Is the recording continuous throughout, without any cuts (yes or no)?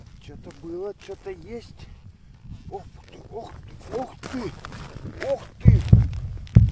no